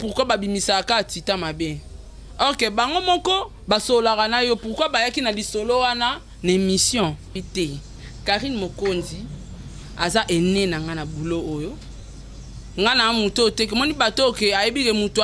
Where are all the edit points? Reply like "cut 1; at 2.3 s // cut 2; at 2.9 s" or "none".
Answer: cut 1; at 7.4 s